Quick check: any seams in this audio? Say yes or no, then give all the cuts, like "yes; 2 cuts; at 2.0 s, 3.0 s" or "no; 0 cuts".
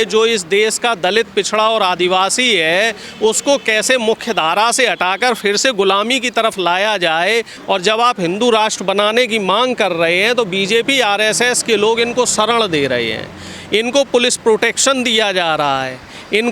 yes; 1 cut; at 7.5 s